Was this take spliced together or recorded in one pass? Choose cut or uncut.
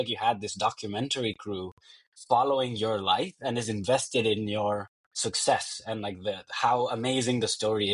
uncut